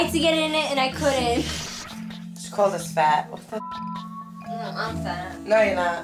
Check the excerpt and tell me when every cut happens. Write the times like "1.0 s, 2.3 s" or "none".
1.8 s